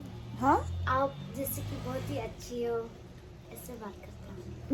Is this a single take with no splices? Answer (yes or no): yes